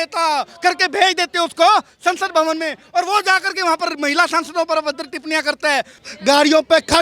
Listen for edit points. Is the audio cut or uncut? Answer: cut